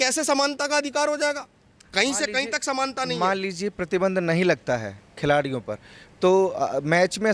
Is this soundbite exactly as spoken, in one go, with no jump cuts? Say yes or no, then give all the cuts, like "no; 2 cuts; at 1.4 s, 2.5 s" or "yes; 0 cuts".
yes; 0 cuts